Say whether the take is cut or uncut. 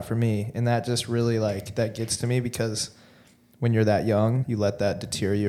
cut